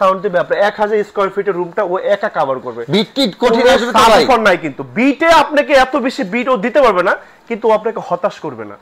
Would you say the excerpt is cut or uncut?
uncut